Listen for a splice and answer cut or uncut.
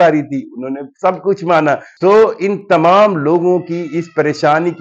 cut